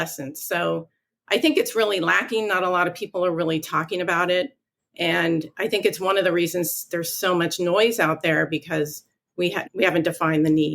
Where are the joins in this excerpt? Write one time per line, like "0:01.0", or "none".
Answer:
0:09.6

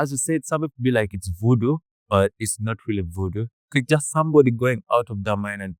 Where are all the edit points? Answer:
none

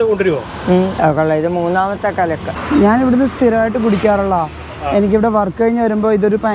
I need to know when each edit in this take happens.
0:02.6

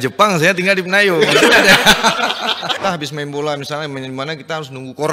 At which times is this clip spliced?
0:02.7

